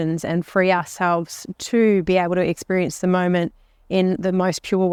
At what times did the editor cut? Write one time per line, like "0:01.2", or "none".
none